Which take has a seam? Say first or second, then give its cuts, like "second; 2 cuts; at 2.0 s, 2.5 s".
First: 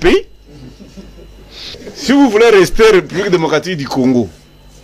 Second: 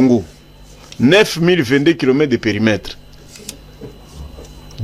first; 1 cut; at 1.8 s